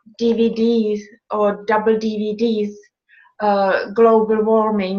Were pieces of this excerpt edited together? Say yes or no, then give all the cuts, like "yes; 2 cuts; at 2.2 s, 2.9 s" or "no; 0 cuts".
no; 0 cuts